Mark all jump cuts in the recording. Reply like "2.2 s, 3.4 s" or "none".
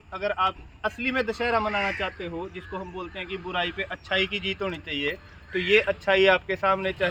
none